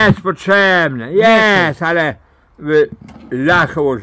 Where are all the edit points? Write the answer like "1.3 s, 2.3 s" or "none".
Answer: none